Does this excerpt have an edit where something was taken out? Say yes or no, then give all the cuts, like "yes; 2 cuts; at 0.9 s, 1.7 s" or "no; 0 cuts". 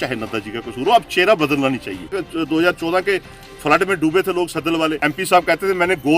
yes; 2 cuts; at 2.1 s, 5.0 s